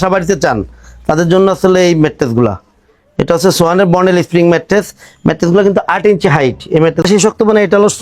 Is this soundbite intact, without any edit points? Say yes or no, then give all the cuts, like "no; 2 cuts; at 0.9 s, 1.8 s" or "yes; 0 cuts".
no; 1 cut; at 7.0 s